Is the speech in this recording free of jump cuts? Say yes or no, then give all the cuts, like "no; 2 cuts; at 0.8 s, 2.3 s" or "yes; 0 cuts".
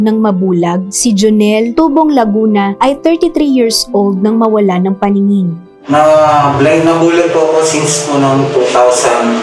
yes; 0 cuts